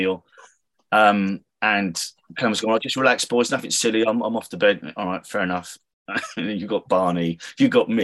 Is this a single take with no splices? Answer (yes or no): yes